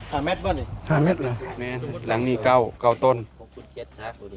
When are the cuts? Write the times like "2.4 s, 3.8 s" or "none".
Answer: 1.9 s